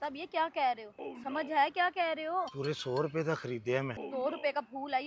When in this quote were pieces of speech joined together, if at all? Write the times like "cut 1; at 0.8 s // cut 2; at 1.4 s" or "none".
cut 1; at 1.2 s // cut 2; at 2.5 s // cut 3; at 4.1 s